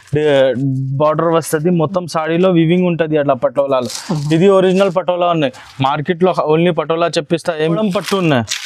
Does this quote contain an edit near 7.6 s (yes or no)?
yes